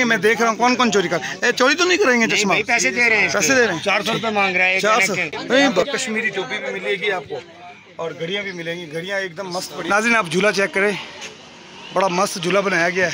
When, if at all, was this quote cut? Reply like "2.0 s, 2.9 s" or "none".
5.8 s, 9.9 s